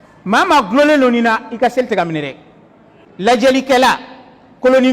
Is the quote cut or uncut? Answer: cut